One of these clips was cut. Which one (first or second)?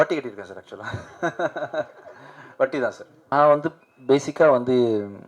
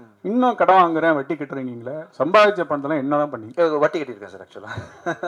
first